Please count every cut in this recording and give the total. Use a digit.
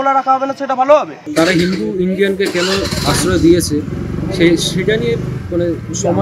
1